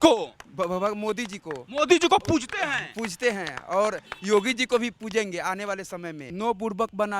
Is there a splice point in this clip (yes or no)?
yes